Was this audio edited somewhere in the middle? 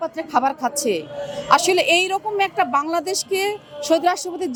no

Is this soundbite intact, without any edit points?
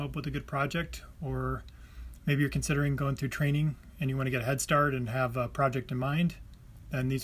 yes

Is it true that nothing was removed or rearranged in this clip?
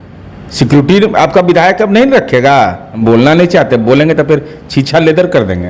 no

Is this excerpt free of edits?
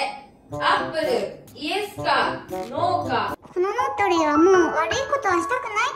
no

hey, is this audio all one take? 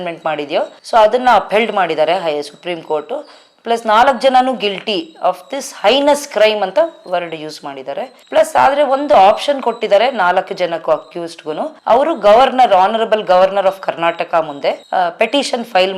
no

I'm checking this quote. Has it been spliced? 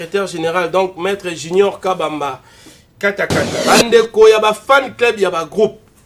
yes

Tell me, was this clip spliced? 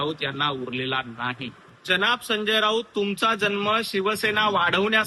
yes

